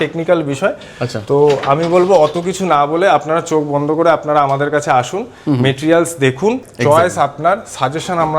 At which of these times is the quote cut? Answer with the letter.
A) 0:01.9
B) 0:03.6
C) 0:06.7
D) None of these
C